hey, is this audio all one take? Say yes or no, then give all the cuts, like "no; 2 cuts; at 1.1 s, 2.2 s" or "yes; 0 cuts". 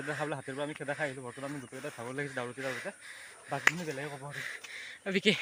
yes; 0 cuts